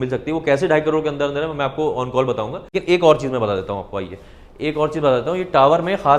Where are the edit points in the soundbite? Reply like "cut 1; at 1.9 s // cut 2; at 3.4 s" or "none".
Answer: cut 1; at 2.8 s